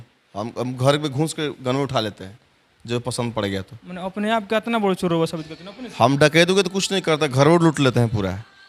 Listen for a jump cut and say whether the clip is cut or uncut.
uncut